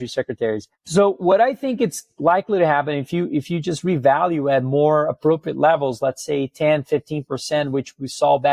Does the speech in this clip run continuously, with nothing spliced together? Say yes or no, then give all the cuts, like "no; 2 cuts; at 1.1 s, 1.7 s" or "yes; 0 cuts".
yes; 0 cuts